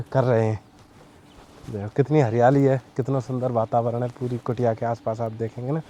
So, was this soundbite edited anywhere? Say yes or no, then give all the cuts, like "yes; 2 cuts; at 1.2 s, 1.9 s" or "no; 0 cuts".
no; 0 cuts